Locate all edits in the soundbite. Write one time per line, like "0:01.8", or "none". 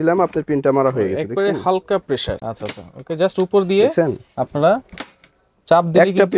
0:02.4